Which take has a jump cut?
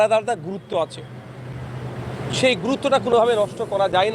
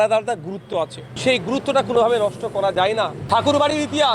second; 2 cuts; at 1.0 s, 3.2 s

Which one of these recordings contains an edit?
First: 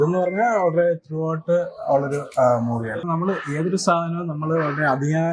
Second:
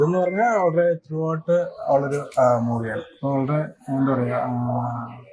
first; 1 cut; at 3.0 s

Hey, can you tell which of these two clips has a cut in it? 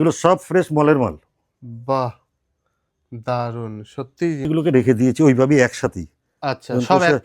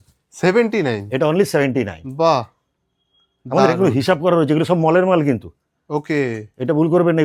first; 1 cut; at 4.5 s

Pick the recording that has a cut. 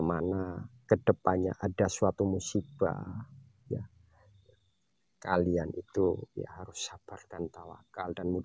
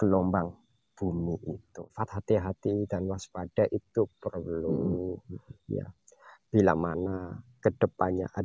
second; 1 cut; at 2.0 s

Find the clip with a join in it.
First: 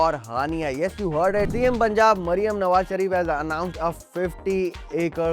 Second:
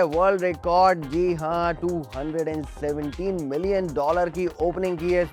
first; 1 cut; at 1.5 s

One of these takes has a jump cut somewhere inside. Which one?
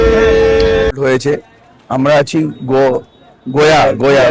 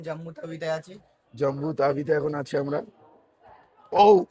first; 1 cut; at 0.9 s

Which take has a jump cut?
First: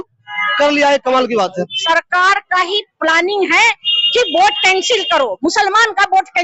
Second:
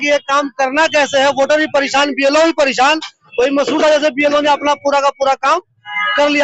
first; 1 cut; at 1.8 s

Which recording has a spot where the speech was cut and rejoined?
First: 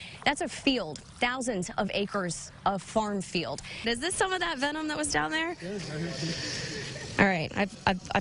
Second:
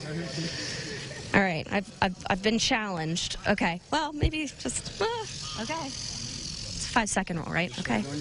first; 1 cut; at 3.8 s

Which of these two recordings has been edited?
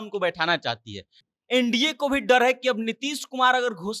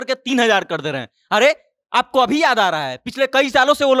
first; 1 cut; at 1.2 s

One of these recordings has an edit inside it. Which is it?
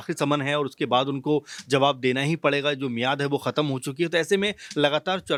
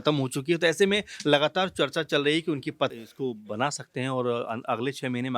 second; 1 cut; at 2.9 s

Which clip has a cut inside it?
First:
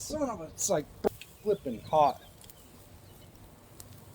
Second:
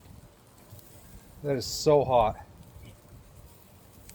first; 1 cut; at 1.1 s

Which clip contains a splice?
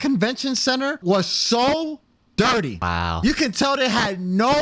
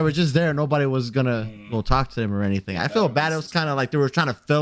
first; 2 cuts; at 1.0 s, 2.8 s

